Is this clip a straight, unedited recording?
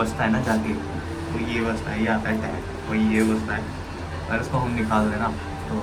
yes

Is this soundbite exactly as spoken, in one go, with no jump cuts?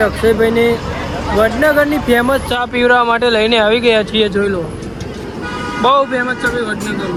yes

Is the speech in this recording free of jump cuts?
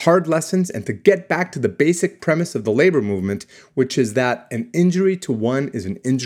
yes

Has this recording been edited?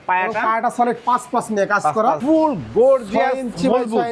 yes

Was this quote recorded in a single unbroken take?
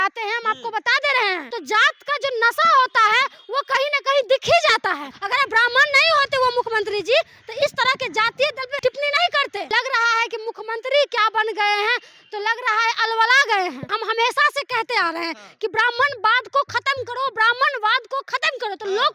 no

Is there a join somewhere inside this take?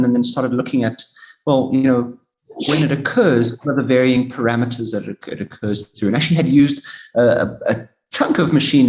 no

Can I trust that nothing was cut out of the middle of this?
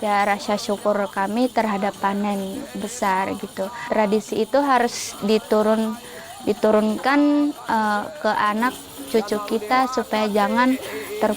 no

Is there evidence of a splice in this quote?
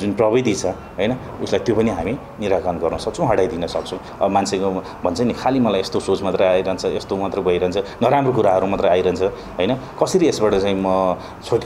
yes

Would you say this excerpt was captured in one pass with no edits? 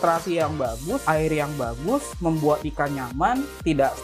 no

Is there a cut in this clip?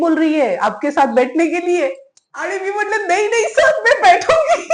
no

